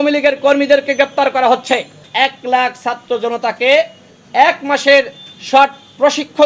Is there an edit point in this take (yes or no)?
yes